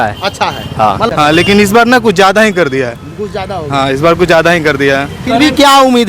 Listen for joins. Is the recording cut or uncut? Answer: cut